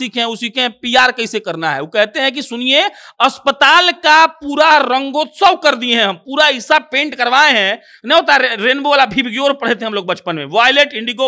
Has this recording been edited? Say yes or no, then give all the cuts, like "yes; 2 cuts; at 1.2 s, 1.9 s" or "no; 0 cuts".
no; 0 cuts